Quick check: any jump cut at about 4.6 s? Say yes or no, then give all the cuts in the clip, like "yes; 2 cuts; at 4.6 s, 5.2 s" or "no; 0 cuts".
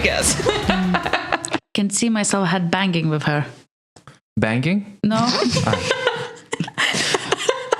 no; 1 cut; at 1.5 s